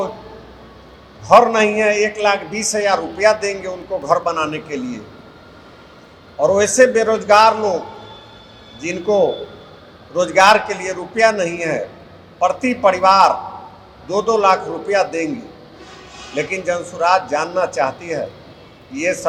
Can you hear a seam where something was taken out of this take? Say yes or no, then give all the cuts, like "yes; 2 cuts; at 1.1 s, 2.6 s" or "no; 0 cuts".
no; 0 cuts